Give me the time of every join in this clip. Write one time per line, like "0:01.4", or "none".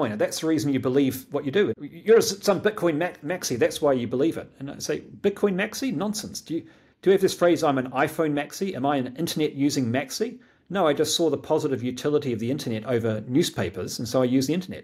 0:01.8